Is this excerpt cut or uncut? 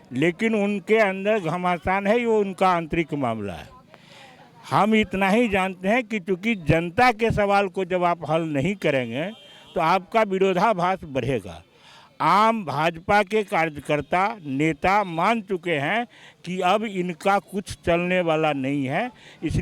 uncut